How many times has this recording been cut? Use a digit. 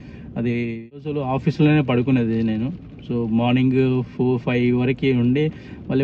1